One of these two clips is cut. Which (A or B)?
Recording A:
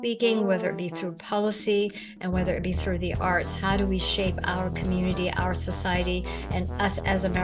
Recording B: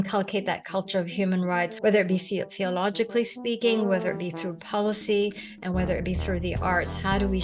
B